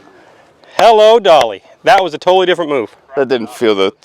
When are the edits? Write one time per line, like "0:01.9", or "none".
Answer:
0:03.0